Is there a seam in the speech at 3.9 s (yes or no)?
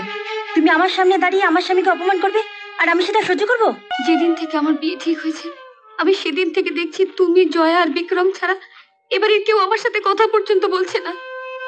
yes